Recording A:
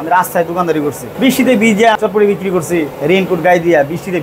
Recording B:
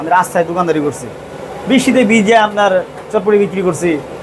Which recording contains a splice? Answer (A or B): A